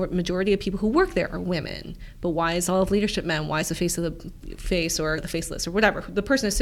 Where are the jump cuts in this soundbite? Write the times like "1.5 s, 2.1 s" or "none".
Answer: none